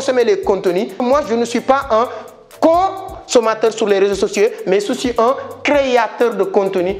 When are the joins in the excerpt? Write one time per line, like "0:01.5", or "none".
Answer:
0:01.0